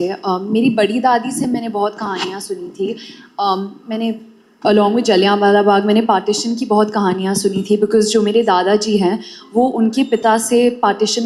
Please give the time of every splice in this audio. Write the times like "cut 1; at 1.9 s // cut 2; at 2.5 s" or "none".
none